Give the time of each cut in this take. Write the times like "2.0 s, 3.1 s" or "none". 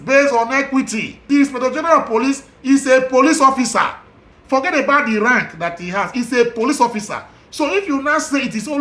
1.2 s